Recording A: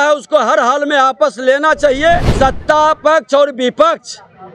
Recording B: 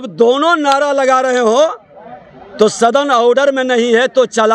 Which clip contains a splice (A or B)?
A